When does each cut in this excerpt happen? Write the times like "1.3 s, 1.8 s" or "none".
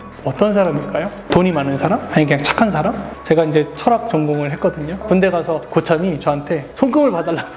3.1 s, 6.7 s